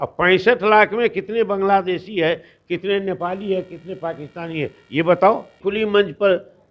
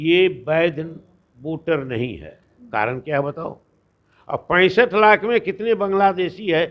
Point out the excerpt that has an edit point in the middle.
first; 1 cut; at 5.6 s

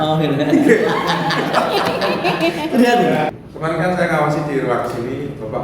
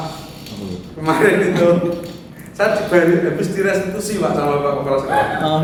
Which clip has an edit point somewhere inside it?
first; 1 cut; at 3.4 s

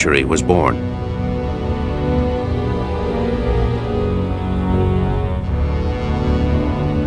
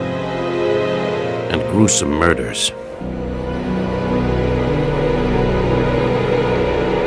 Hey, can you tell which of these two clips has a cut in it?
second; 1 cut; at 1.6 s

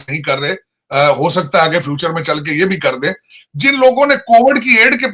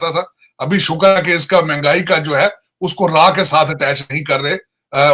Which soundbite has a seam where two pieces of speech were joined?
first; 1 cut; at 3.3 s

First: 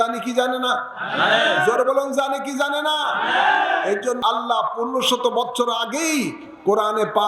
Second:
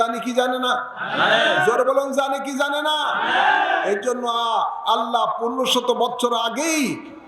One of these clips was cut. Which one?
first; 1 cut; at 4.2 s

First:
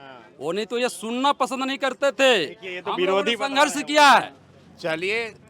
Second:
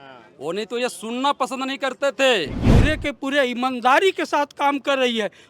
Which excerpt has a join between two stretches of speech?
second; 1 cut; at 2.6 s

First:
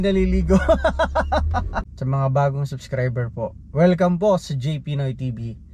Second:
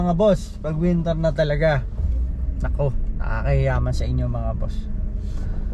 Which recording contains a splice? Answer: first; 1 cut; at 1.9 s

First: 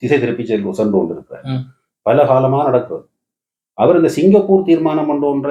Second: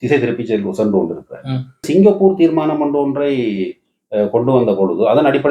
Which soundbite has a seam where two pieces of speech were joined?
second; 1 cut; at 1.9 s

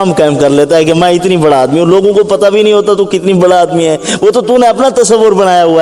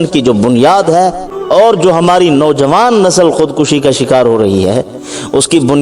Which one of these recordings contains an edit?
second; 1 cut; at 1.3 s

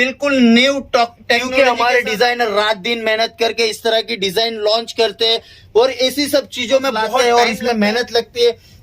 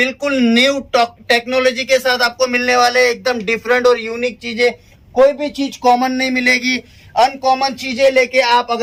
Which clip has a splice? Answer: first; 2 cuts; at 1.5 s, 7.1 s

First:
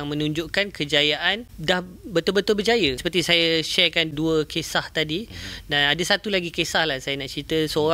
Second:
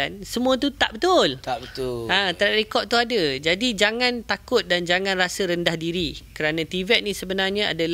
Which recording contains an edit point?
first; 3 cuts; at 1.5 s, 3.0 s, 4.1 s

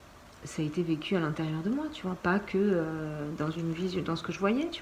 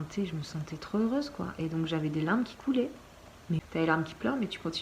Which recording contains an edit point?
second; 1 cut; at 3.6 s

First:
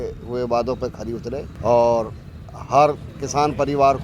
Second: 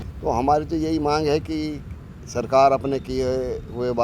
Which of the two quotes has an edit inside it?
first; 1 cut; at 1.5 s

